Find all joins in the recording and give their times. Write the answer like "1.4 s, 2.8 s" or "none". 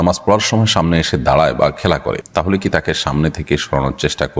none